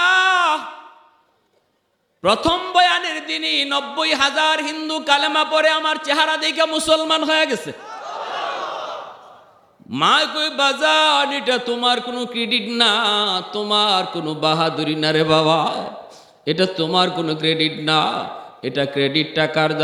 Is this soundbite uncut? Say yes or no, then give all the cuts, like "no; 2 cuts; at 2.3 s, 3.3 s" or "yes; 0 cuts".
yes; 0 cuts